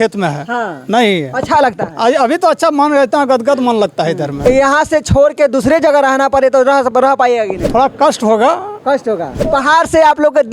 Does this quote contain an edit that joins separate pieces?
yes; 3 cuts; at 4.3 s, 7.6 s, 9.4 s

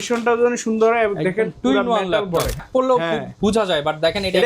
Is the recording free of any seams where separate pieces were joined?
no; 1 cut; at 2.6 s

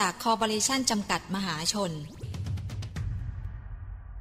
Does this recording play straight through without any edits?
no; 1 cut; at 2.3 s

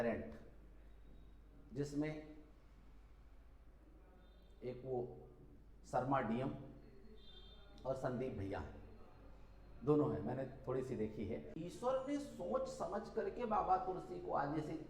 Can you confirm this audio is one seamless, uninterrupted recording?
no; 1 cut; at 11.5 s

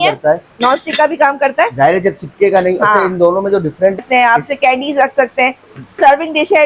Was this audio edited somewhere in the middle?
yes; 1 cut; at 4.0 s

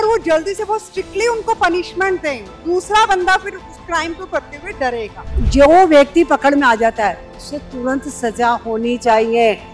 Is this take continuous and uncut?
no; 2 cuts; at 2.6 s, 5.3 s

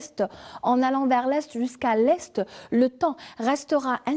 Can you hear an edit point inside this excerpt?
yes; 1 cut; at 2.6 s

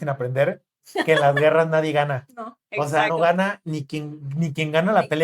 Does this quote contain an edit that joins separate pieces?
no; 0 cuts

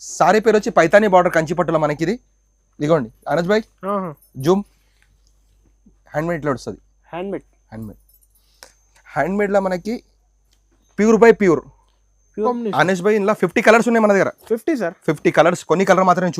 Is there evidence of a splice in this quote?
yes; 1 cut; at 12.5 s

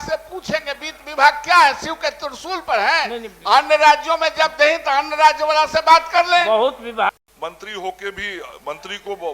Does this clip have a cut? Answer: yes; 1 cut; at 7.1 s

